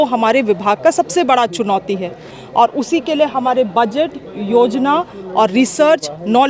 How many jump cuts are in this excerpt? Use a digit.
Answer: 0